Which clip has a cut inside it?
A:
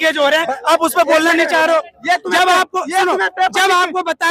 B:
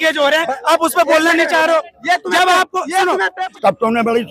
B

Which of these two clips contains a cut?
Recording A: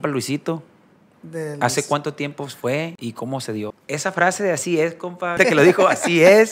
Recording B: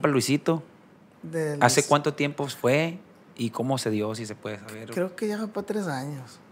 A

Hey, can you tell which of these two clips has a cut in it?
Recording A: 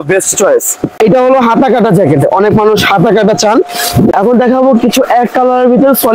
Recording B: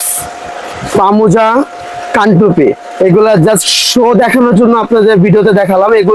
A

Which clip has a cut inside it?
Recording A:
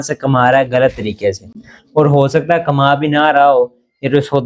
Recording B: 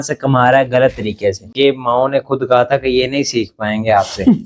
B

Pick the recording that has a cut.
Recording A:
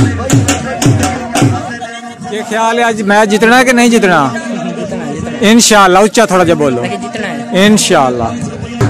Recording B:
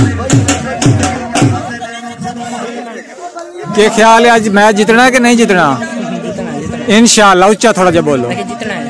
A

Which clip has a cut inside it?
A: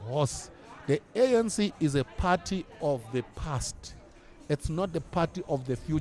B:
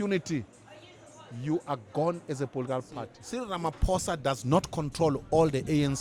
B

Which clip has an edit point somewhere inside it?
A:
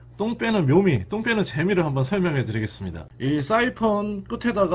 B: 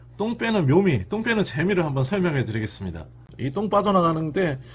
B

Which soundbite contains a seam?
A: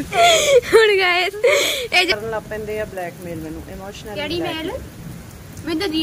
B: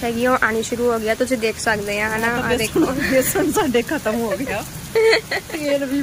A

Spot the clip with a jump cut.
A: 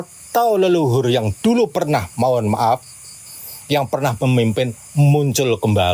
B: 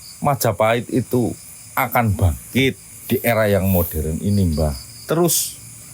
B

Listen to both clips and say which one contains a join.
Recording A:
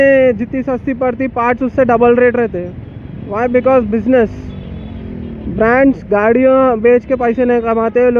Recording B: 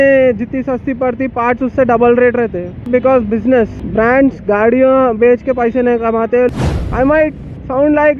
B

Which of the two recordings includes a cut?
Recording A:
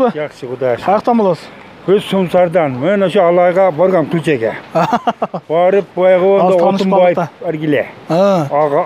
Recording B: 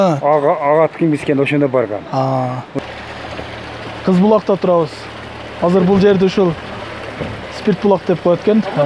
B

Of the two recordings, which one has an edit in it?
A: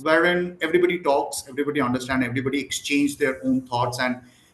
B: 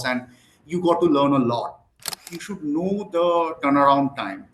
B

